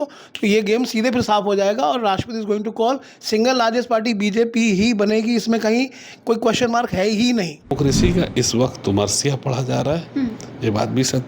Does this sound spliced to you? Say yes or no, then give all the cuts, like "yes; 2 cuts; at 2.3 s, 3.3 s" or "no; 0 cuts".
yes; 1 cut; at 7.7 s